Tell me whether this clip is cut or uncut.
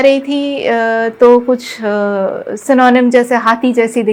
uncut